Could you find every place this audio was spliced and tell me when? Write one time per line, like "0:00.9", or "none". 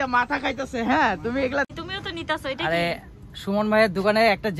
0:01.7